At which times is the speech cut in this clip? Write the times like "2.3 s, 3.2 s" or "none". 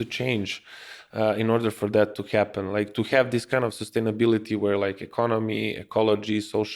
none

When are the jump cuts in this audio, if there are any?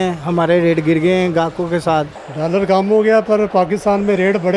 2.3 s

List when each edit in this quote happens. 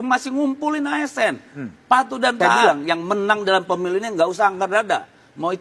2.6 s

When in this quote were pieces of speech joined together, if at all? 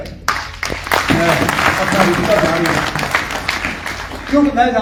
none

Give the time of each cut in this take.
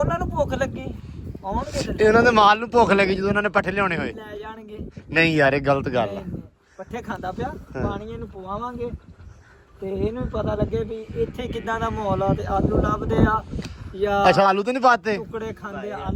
none

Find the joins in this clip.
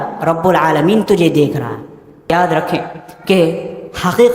2.3 s

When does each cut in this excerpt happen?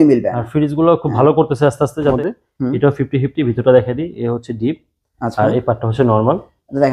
2.1 s

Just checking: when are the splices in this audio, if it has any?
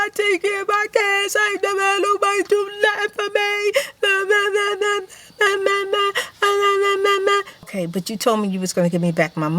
7.6 s

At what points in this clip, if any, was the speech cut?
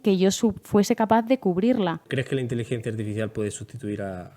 2.0 s

